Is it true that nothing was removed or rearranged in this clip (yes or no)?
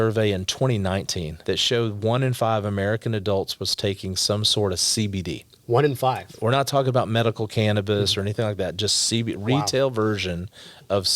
no